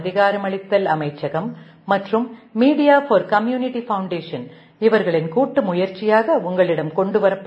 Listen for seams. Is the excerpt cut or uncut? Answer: uncut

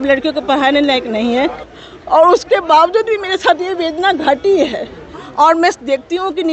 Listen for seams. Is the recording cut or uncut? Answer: cut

